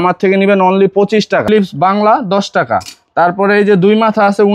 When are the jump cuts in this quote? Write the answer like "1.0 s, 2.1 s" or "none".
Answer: 1.4 s

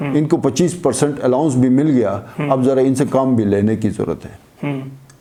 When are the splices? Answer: none

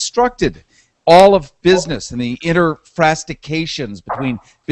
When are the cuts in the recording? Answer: 1.9 s

